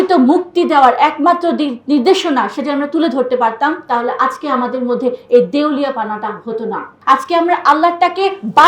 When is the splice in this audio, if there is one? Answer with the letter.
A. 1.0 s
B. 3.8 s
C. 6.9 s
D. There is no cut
C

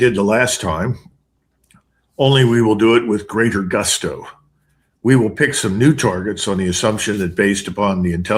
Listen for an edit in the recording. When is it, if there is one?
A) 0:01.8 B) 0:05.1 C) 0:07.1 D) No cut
C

